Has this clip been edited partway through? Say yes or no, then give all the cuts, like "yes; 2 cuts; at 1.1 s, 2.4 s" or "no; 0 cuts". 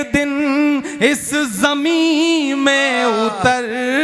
no; 0 cuts